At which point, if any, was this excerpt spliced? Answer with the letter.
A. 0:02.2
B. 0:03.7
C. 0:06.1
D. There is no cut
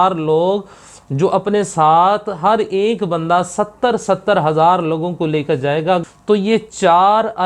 C